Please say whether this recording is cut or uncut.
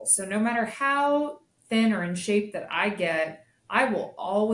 uncut